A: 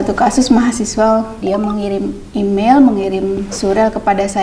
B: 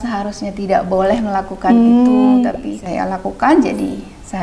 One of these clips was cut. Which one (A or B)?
A